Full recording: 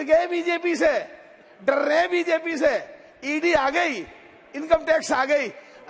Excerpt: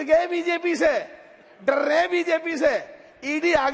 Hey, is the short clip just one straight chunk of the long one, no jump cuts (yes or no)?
yes